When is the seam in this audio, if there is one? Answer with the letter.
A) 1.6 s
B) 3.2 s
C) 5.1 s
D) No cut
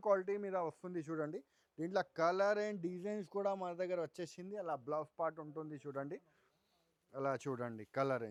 D